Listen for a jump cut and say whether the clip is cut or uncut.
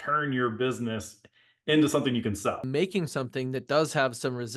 cut